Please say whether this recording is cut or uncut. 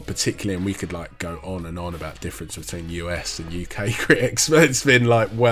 uncut